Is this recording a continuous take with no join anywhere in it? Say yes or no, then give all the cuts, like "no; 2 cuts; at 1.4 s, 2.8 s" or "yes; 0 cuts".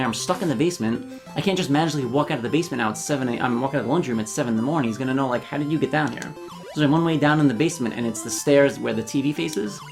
yes; 0 cuts